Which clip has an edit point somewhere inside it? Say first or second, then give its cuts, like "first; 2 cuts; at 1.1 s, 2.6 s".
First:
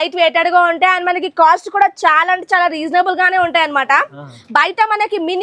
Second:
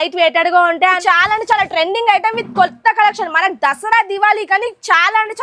second; 1 cut; at 1.0 s